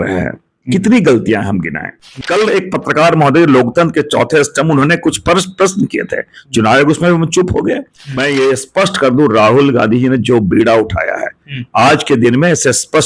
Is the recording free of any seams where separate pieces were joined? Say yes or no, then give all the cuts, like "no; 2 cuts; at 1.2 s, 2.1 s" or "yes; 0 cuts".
no; 2 cuts; at 2.0 s, 8.2 s